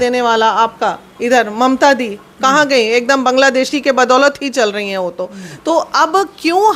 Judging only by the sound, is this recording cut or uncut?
uncut